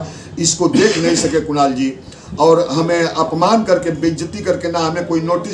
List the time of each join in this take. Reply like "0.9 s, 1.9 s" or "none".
none